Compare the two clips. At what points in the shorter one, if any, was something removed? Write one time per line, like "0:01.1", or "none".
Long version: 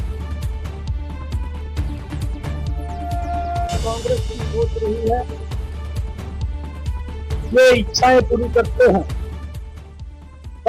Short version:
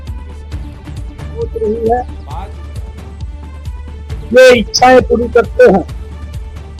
0:01.5

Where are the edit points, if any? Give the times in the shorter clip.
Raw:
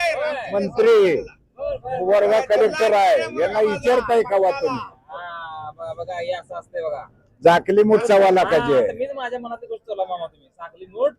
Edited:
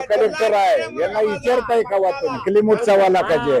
0:02.4

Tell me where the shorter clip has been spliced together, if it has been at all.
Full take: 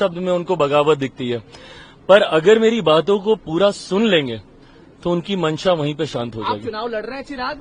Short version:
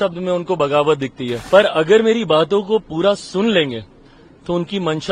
0:01.3

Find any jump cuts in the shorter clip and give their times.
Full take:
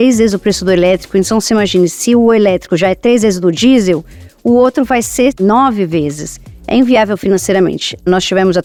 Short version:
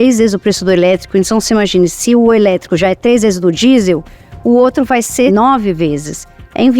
0:05.3

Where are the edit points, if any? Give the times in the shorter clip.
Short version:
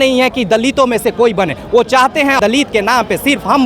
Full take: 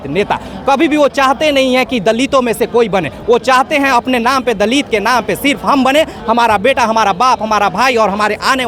0:02.4

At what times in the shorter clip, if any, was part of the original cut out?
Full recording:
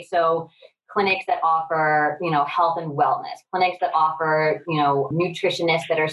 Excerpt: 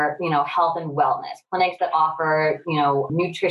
none

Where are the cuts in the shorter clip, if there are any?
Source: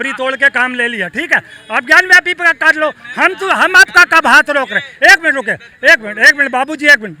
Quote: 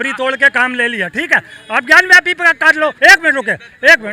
0:03.0

